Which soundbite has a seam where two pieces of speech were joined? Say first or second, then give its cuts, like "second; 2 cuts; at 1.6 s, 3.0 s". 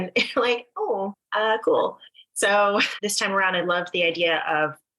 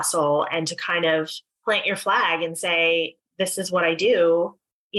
first; 2 cuts; at 1.2 s, 3.0 s